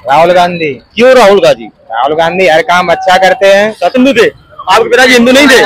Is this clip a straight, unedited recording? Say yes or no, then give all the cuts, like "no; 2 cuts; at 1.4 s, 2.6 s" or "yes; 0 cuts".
no; 1 cut; at 4.0 s